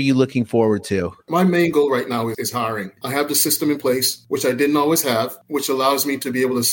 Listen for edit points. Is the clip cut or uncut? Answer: cut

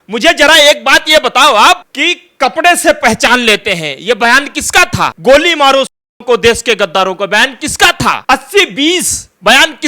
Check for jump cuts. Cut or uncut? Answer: cut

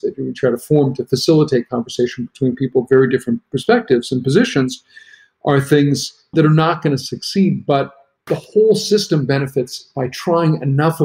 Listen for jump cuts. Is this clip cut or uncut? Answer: uncut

